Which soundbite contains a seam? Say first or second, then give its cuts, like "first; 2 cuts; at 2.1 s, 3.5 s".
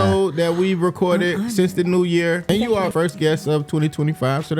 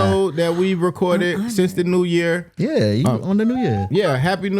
first; 1 cut; at 2.7 s